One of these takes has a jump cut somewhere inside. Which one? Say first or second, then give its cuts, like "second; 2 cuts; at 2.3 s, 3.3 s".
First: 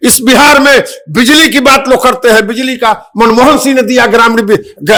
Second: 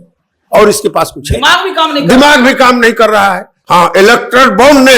second; 1 cut; at 3.5 s